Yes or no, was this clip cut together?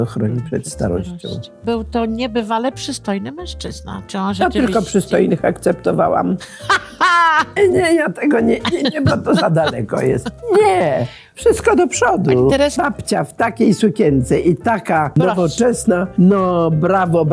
yes